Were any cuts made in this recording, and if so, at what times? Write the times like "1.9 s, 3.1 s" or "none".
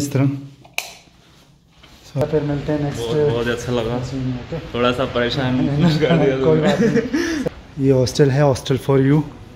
2.2 s, 7.4 s